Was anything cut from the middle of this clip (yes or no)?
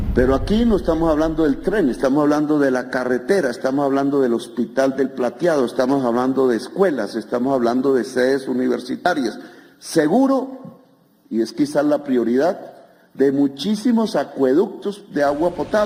no